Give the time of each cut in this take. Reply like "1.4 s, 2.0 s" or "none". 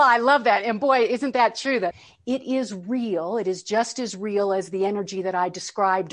2.1 s